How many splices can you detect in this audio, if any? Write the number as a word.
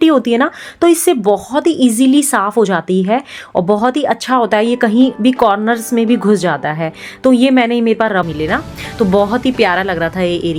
one